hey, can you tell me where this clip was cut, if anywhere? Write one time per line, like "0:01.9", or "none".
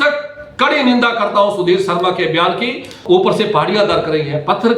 0:03.0